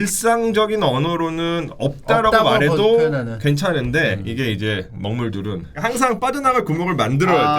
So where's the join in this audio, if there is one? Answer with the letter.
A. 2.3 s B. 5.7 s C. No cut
B